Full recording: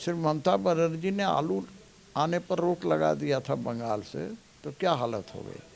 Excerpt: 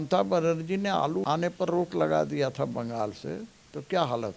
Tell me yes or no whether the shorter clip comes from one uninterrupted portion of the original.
no